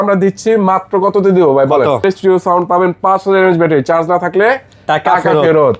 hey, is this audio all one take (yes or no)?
no